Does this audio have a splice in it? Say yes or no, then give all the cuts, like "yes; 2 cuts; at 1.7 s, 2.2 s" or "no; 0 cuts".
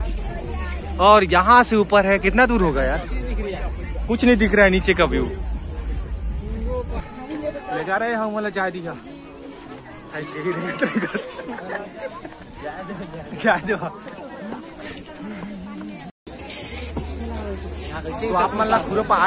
yes; 2 cuts; at 7.0 s, 16.2 s